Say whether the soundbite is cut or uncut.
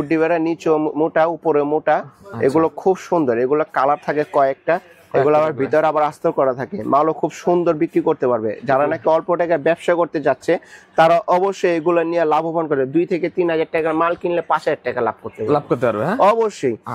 uncut